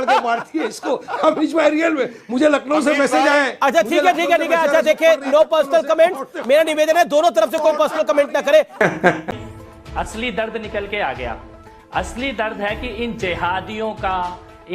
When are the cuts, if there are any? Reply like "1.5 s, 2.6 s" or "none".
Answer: 9.3 s